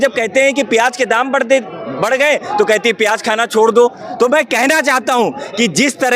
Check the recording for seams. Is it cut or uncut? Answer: uncut